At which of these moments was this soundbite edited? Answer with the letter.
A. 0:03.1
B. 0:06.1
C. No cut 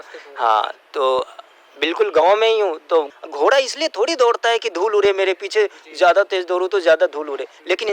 A